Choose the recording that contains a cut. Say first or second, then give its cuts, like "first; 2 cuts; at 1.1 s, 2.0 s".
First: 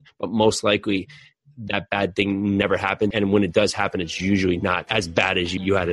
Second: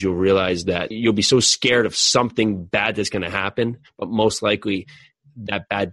first; 2 cuts; at 3.1 s, 4.8 s